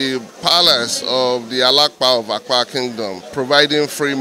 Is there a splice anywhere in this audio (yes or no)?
yes